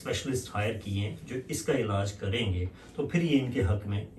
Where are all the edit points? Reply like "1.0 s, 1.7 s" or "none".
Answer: none